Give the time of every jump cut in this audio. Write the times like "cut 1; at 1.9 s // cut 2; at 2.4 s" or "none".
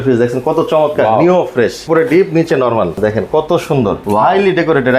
cut 1; at 1.8 s // cut 2; at 3.0 s // cut 3; at 4.0 s